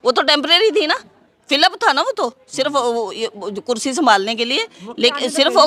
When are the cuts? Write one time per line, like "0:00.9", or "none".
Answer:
none